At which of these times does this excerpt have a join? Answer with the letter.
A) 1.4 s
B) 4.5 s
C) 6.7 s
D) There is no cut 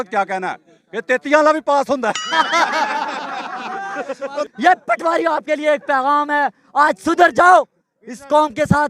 B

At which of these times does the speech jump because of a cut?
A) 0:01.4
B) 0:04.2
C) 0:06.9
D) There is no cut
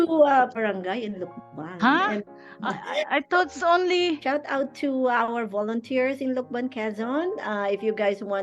B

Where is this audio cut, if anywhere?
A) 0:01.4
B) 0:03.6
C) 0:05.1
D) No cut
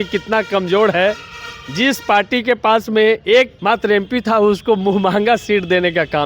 B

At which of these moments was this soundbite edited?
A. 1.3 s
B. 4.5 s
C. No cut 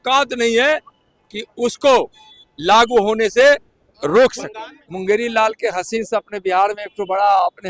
B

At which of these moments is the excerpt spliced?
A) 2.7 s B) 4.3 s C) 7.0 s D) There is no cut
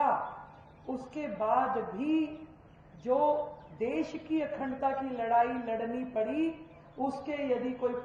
D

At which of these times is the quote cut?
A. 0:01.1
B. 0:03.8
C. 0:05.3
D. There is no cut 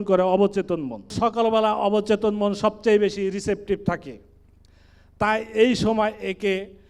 A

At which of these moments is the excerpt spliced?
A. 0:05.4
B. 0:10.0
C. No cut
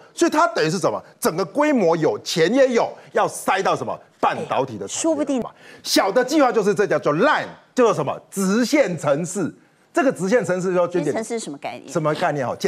A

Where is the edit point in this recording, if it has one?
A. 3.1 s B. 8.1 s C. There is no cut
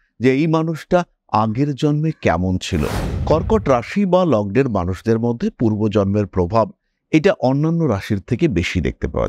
A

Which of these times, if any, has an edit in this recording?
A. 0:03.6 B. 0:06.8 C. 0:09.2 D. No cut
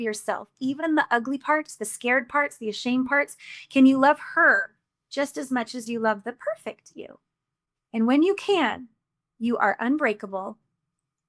D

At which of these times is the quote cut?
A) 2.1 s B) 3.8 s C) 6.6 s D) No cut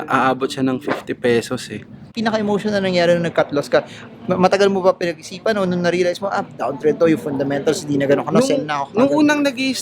A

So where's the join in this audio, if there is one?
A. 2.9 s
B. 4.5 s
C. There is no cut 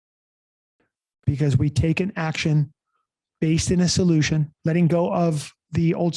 B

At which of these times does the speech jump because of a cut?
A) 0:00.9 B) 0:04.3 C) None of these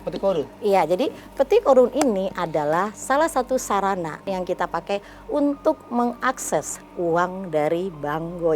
B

